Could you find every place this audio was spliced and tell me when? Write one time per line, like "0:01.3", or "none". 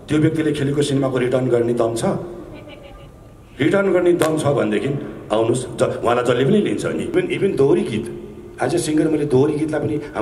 0:07.1